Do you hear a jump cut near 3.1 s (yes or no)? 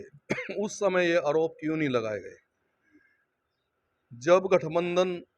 no